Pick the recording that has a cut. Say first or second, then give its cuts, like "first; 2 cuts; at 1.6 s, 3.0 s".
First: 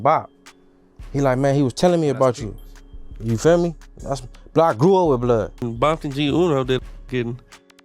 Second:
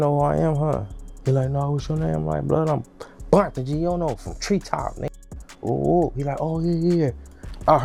first; 1 cut; at 5.5 s